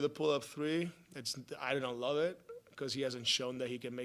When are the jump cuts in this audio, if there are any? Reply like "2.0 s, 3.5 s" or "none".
none